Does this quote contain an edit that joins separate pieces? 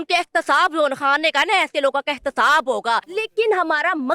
yes; 1 cut; at 3.1 s

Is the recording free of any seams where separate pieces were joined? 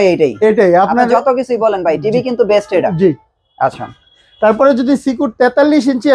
yes; 0 cuts

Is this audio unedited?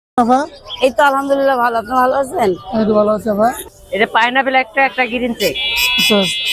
no; 1 cut; at 3.6 s

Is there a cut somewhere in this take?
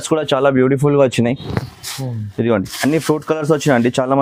no; 0 cuts

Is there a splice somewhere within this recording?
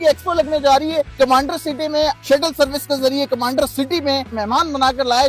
yes; 3 cuts; at 1.1 s, 2.2 s, 4.4 s

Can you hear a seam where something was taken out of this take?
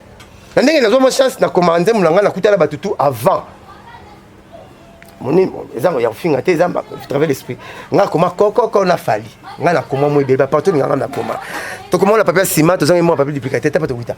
no; 0 cuts

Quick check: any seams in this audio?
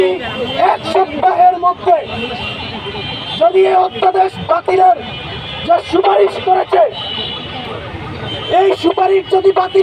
no; 0 cuts

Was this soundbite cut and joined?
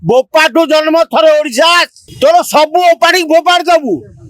yes; 1 cut; at 2.0 s

